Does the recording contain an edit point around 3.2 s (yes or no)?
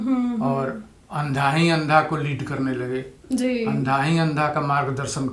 no